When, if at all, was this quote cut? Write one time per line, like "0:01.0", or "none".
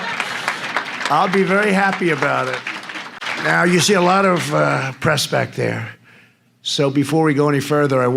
0:03.3